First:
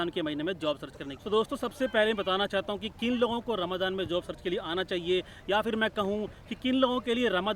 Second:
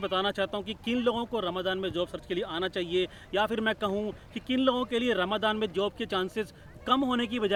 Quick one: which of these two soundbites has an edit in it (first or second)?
first